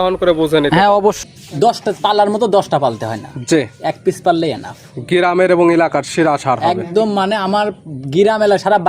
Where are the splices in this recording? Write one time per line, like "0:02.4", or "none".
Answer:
0:01.2